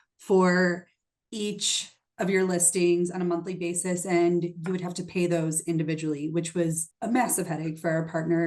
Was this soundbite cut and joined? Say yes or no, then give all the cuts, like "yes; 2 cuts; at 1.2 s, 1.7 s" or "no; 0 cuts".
yes; 1 cut; at 6.9 s